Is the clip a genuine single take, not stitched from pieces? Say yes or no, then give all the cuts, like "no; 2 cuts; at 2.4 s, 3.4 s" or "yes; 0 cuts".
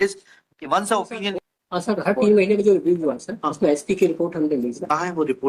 no; 1 cut; at 1.3 s